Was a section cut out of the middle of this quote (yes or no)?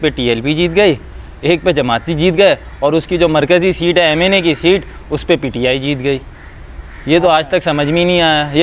no